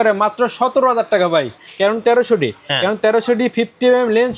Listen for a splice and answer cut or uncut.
cut